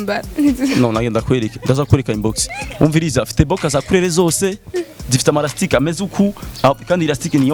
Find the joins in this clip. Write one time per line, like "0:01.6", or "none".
none